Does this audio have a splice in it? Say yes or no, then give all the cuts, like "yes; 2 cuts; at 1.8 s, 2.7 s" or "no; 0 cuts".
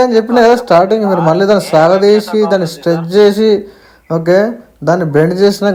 no; 0 cuts